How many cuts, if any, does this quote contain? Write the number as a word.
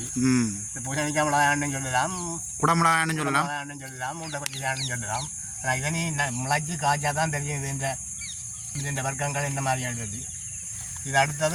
zero